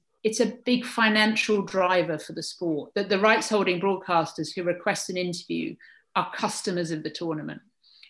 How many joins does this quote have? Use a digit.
0